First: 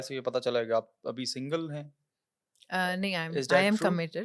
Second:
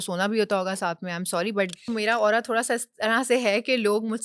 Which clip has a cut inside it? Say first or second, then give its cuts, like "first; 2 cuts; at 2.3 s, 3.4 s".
second; 1 cut; at 1.9 s